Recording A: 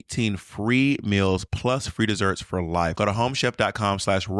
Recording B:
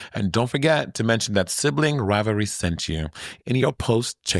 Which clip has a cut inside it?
A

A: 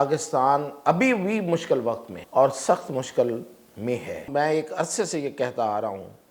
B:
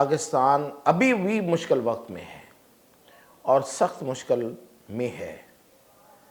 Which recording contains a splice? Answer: A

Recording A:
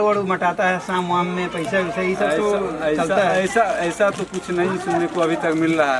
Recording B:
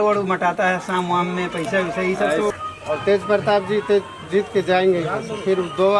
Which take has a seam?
B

